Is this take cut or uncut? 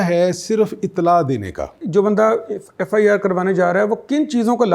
cut